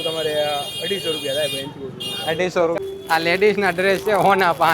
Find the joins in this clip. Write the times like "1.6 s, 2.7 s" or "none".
2.8 s

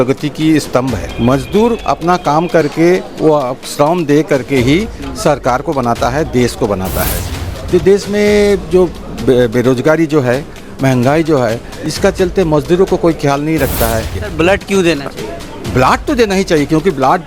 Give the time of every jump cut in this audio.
1.1 s, 7.4 s, 14.2 s

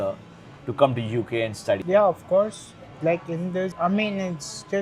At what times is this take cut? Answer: none

